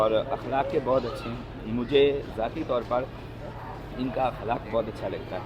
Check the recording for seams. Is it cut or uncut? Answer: uncut